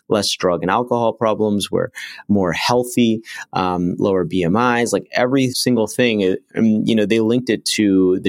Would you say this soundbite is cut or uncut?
cut